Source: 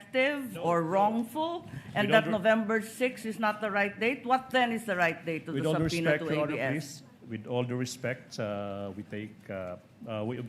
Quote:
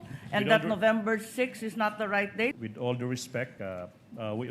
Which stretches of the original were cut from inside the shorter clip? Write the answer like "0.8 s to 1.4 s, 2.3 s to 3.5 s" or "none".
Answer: 4.2 s to 7.3 s, 8.2 s to 9.4 s